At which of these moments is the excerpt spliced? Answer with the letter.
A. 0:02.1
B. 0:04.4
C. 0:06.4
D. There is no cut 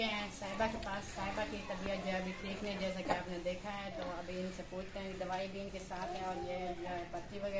D